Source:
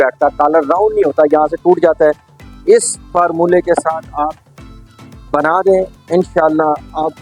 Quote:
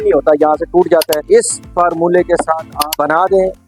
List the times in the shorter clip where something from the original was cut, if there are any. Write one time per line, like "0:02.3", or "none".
0:01.2
0:02.8